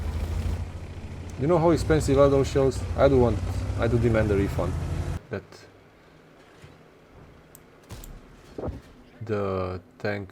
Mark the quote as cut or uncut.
cut